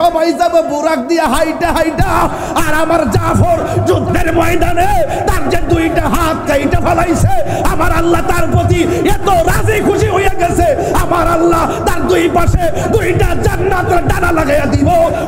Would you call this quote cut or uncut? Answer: uncut